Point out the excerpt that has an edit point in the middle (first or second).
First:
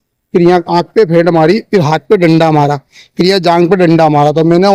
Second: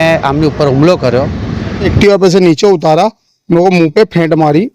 second